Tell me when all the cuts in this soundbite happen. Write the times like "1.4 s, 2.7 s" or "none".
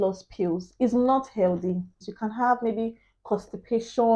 2.1 s